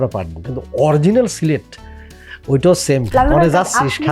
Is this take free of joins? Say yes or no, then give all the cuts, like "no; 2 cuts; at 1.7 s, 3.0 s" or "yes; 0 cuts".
no; 1 cut; at 3.1 s